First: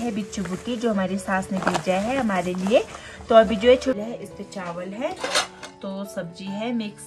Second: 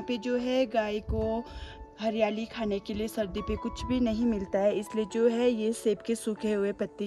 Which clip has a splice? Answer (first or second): first